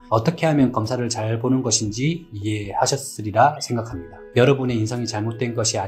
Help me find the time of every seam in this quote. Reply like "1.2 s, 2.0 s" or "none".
4.2 s